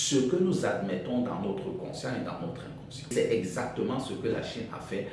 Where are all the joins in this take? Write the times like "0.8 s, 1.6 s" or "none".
3.1 s